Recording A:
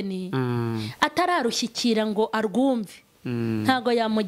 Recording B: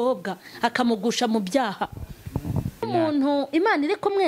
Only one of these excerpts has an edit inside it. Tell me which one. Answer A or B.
B